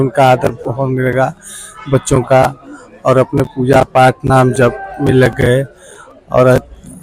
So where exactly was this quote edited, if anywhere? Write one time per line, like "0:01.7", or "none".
none